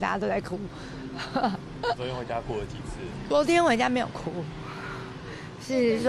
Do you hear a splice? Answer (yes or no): yes